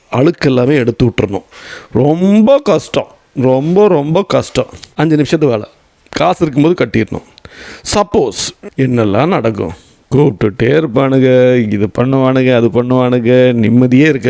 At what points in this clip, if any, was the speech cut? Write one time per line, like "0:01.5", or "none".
0:04.8
0:08.5